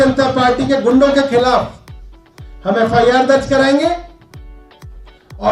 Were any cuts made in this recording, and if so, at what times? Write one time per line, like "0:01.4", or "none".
none